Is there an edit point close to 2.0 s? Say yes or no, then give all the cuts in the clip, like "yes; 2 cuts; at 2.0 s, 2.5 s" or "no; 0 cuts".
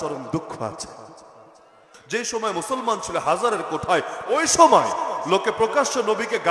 yes; 1 cut; at 2.0 s